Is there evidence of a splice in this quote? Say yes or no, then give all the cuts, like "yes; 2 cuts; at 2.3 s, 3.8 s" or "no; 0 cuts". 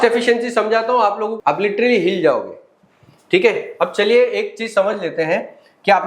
yes; 1 cut; at 1.4 s